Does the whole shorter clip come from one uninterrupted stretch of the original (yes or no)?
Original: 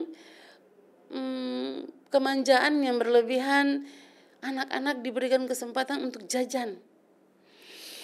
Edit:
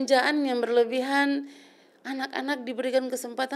yes